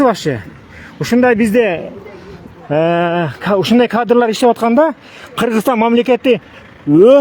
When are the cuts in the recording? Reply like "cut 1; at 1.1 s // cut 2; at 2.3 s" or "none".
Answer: none